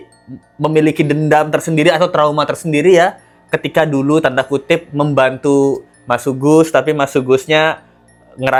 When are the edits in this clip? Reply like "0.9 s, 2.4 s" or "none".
none